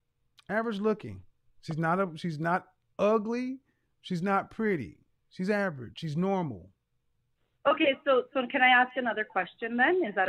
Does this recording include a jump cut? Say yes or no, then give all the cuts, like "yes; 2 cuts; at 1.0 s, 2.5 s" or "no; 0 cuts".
no; 0 cuts